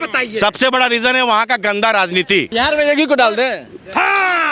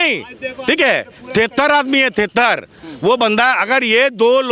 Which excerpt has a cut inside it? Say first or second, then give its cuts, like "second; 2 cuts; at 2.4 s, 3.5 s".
first; 1 cut; at 2.5 s